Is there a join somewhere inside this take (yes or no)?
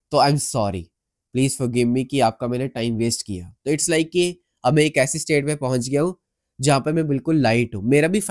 no